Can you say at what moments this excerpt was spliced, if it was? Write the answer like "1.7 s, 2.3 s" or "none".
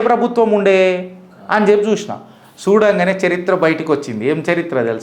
none